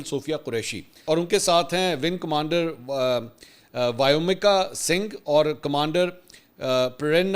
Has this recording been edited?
yes; 1 cut; at 1.0 s

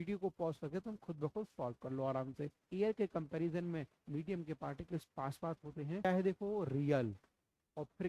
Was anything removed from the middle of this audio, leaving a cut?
yes; 2 cuts; at 2.6 s, 6.1 s

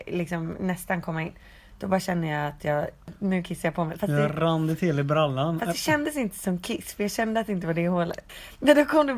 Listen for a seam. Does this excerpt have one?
yes; 2 cuts; at 3.2 s, 8.2 s

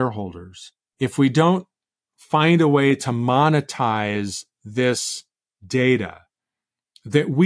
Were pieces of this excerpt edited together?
no; 0 cuts

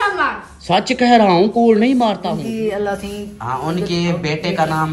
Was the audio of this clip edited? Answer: yes; 1 cut; at 2.3 s

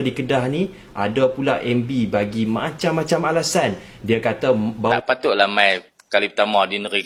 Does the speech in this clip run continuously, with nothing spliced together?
yes; 0 cuts

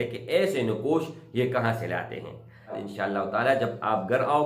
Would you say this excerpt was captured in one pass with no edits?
no; 1 cut; at 2.8 s

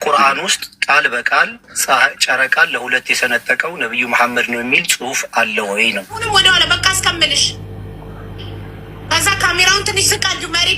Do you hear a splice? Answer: yes; 1 cut; at 6.2 s

